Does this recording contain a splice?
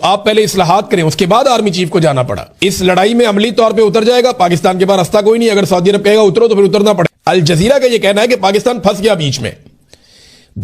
yes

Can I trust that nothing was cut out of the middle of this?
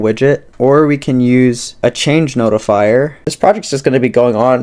no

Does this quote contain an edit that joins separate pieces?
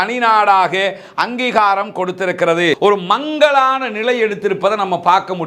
yes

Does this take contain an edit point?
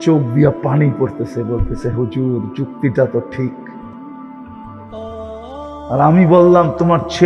yes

